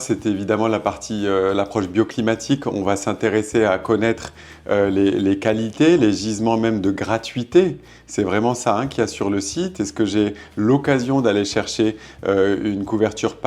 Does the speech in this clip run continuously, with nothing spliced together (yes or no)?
yes